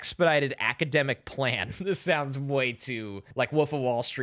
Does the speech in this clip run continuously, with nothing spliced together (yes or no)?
no